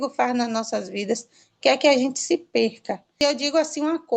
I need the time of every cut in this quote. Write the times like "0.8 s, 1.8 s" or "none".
3.0 s

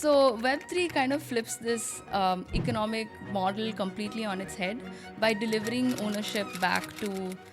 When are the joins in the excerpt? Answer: none

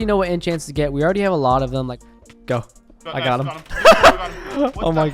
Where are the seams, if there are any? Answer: 1.9 s

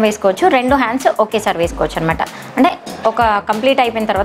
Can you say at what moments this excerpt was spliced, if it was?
none

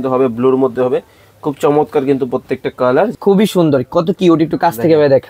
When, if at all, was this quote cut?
3.1 s

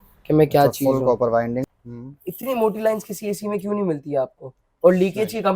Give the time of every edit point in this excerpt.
1.6 s

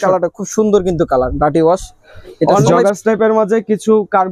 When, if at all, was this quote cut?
2.8 s

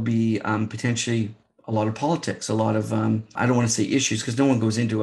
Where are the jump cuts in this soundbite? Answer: 3.3 s

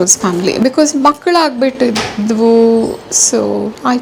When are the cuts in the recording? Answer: none

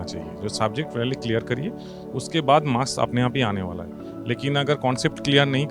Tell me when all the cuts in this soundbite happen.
none

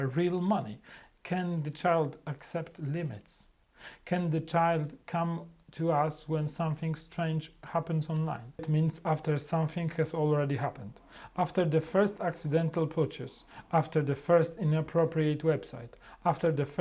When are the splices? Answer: 8.6 s

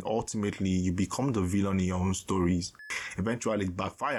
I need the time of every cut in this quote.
2.8 s

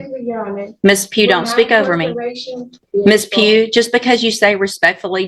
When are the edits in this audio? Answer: 2.8 s

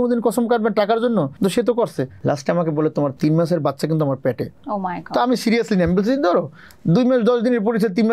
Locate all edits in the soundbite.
1.3 s, 2.1 s, 3.1 s, 4.5 s

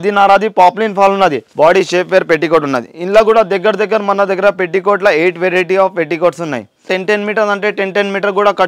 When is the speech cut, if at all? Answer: 1.4 s, 6.9 s

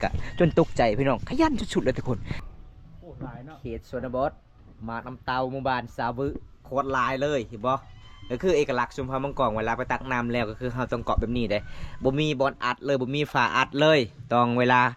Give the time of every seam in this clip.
2.4 s

